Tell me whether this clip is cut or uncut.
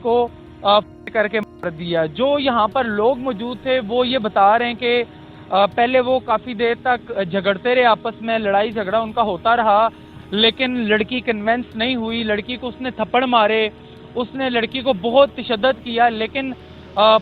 uncut